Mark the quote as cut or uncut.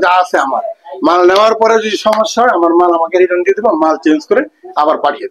uncut